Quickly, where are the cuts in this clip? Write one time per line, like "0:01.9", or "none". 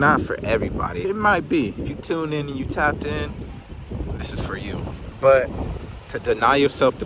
0:01.1
0:01.8
0:03.5
0:04.9